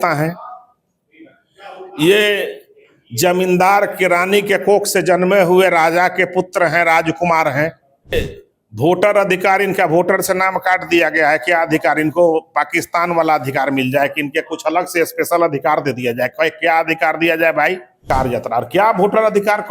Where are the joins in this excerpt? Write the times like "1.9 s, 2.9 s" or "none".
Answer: 8.1 s, 18.1 s

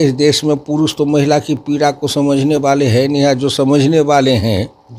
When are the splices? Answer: none

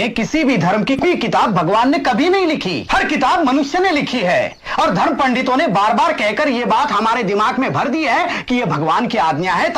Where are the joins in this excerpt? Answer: 1.0 s, 2.8 s

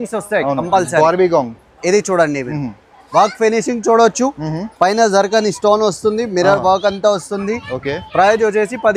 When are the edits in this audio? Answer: none

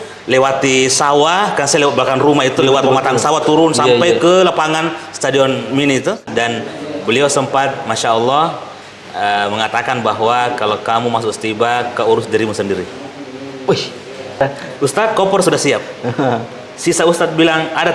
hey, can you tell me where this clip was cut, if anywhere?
6.2 s, 14.4 s

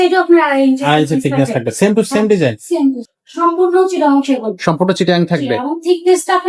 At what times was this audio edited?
3.1 s

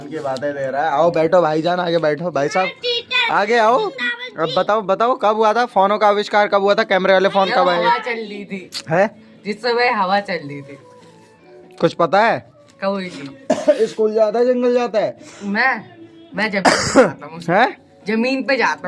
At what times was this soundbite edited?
none

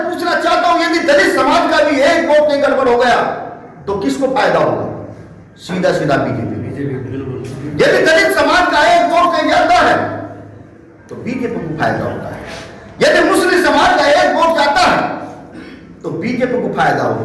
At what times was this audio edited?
none

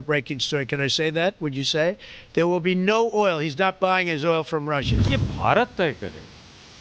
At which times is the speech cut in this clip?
5.0 s

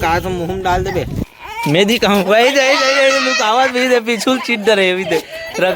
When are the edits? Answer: 1.3 s

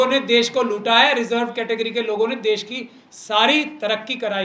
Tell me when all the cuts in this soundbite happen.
none

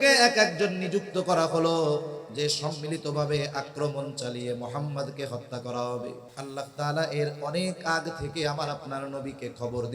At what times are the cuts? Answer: 6.3 s

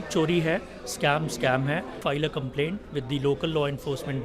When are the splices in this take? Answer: 2.0 s

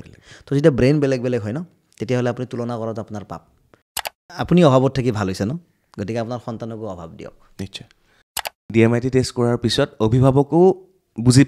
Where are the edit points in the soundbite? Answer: 4.2 s, 8.6 s

